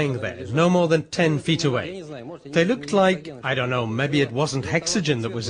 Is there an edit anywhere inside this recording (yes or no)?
no